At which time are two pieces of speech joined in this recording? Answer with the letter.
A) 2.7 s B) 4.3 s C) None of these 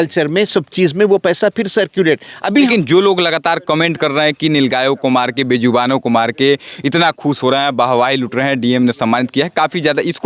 A